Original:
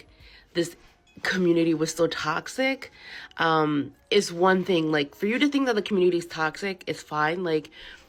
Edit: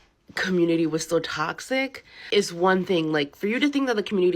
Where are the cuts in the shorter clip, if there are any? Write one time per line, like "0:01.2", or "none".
0:02.2